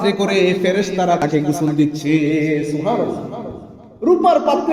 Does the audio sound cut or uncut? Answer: cut